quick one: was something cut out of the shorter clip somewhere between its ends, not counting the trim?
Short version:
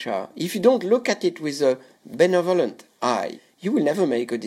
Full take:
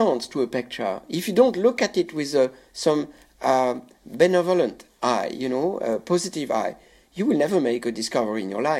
yes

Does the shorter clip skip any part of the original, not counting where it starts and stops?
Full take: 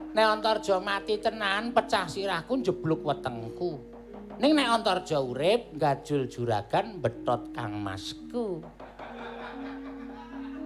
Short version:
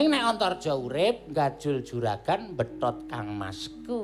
no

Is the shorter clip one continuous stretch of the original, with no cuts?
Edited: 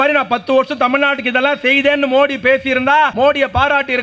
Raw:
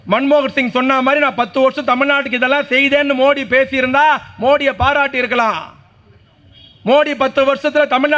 no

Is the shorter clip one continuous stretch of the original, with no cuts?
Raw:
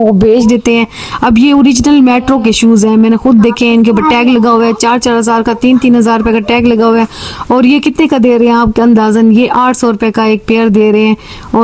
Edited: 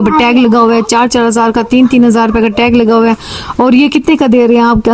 yes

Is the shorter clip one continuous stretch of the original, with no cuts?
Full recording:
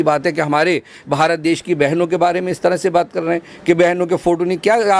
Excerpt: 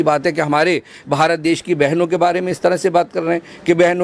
yes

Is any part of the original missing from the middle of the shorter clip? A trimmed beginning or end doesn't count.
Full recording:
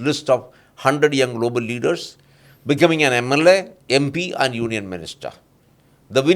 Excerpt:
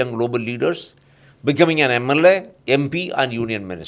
no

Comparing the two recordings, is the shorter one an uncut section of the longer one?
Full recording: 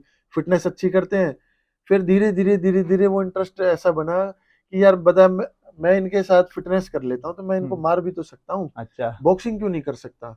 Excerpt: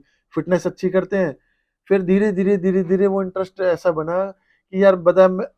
yes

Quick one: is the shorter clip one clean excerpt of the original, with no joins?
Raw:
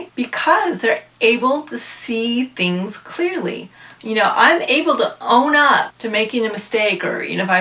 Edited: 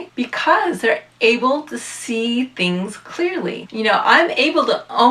no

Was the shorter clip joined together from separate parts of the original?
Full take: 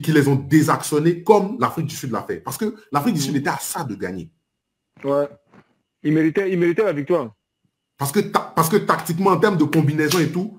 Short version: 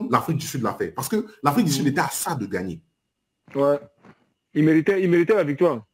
no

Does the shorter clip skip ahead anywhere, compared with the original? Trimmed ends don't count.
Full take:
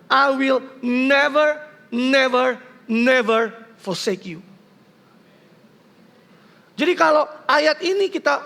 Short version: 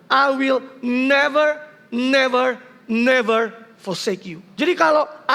yes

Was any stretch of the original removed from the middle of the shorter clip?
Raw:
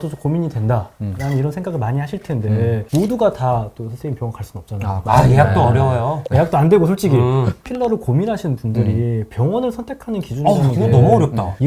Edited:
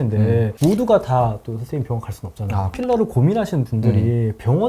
yes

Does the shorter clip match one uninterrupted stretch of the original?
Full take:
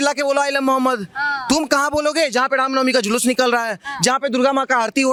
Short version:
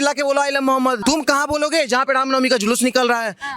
no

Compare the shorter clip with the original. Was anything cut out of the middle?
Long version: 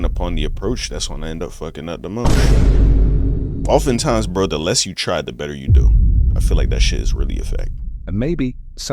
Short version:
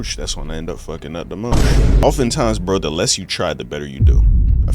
yes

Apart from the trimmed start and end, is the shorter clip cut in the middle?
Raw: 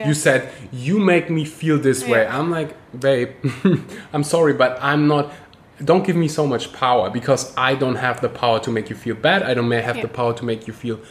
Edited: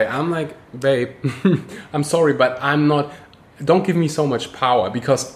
no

